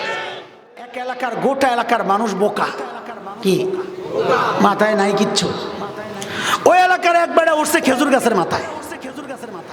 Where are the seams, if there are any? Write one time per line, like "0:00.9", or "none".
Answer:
0:01.0